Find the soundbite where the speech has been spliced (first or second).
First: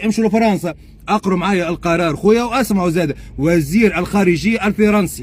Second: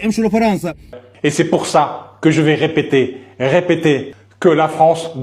second